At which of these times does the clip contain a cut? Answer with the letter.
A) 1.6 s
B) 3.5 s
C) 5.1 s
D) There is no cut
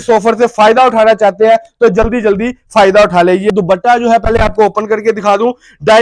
B